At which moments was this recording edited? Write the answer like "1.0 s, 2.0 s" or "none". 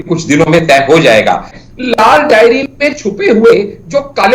1.5 s